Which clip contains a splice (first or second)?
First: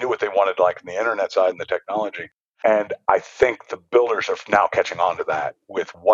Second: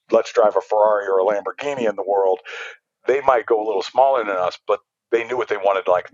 first